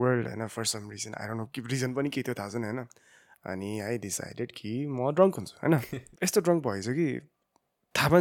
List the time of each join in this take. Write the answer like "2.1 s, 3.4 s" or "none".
6.0 s